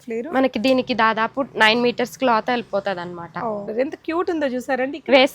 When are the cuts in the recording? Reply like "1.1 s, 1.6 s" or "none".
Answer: 3.7 s